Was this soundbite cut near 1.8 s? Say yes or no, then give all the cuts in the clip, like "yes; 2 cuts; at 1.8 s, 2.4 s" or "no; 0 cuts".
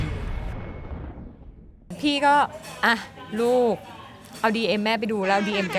yes; 1 cut; at 1.8 s